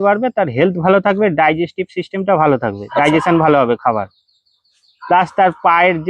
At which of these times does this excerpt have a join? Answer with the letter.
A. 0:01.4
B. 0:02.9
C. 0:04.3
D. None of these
D